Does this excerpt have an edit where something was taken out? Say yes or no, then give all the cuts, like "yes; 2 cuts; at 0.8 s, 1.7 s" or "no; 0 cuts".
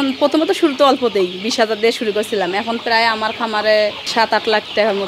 yes; 1 cut; at 4.0 s